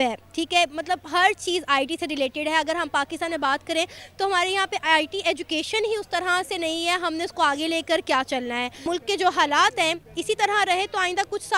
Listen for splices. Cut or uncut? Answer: cut